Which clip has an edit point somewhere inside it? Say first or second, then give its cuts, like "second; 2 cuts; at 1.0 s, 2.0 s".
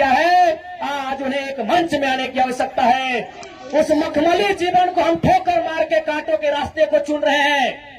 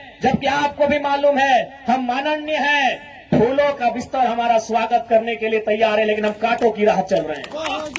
first; 1 cut; at 3.4 s